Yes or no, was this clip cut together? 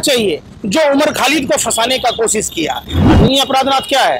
yes